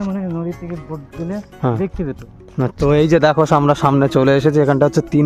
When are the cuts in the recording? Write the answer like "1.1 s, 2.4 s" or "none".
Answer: 2.8 s